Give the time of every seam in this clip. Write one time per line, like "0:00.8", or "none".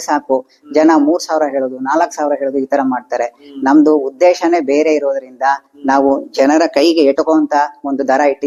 none

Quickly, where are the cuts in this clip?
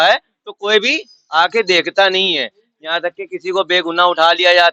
none

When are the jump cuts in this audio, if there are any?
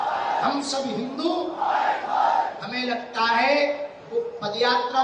none

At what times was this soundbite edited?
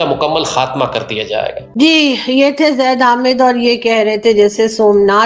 0:01.6

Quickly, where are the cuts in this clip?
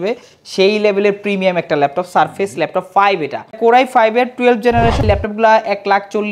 0:03.6
0:05.0

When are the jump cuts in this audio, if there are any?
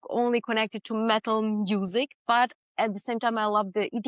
none

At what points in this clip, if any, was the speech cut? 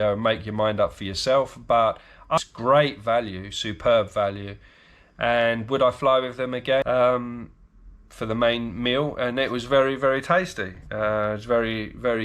0:02.4
0:06.8

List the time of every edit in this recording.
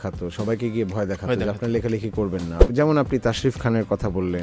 0:02.6

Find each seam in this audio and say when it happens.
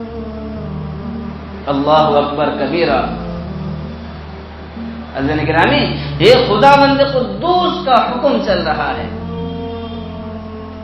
0:01.3

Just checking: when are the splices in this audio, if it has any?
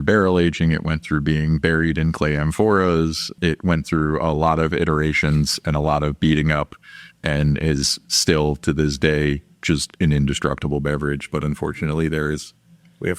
0:03.3

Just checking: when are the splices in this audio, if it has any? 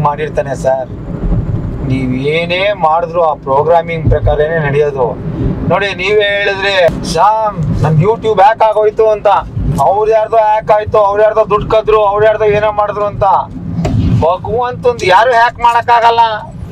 0:06.9
0:09.6

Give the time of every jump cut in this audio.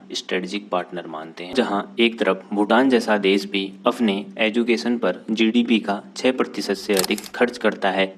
0:01.5

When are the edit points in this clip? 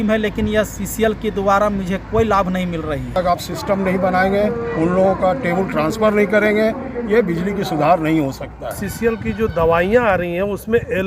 0:03.2
0:08.8

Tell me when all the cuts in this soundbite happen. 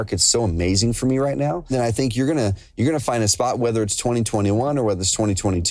0:01.7

